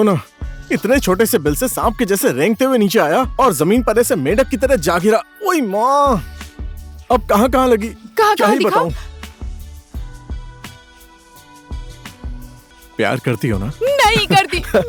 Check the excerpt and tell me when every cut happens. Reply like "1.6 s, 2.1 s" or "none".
none